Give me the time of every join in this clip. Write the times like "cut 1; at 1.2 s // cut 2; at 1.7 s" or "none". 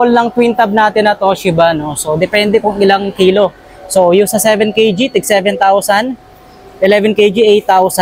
none